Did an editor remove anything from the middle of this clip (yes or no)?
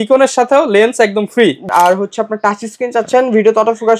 yes